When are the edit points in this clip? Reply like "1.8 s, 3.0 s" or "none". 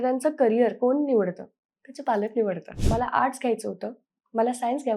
2.7 s